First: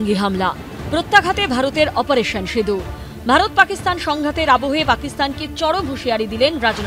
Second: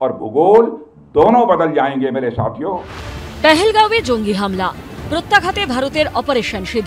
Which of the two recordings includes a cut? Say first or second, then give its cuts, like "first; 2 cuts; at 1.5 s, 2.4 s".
second; 1 cut; at 2.6 s